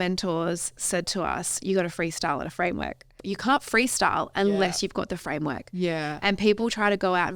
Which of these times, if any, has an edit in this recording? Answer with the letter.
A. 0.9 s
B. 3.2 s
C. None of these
B